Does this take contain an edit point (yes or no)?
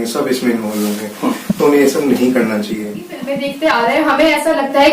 yes